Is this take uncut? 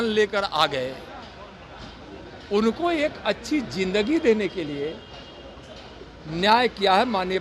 yes; 0 cuts

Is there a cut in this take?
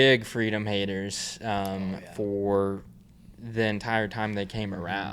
no; 0 cuts

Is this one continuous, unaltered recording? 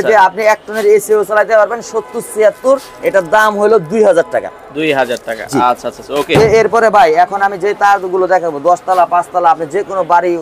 yes; 0 cuts

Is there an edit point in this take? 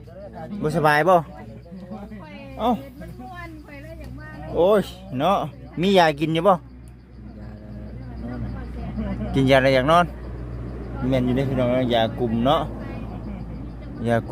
no; 0 cuts

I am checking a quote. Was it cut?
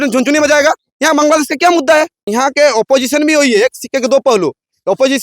yes; 2 cuts; at 0.9 s, 2.2 s

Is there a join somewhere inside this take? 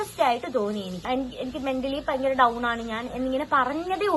yes; 1 cut; at 1.0 s

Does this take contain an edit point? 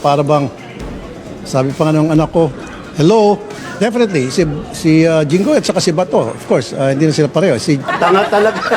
yes; 2 cuts; at 3.6 s, 7.8 s

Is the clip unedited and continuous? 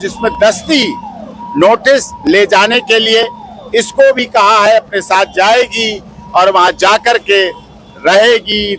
yes; 0 cuts

